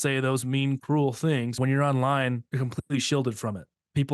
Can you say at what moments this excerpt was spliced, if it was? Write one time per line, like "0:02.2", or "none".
0:01.6
0:02.5